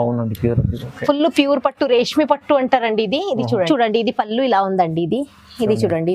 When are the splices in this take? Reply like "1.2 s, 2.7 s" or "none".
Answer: 3.7 s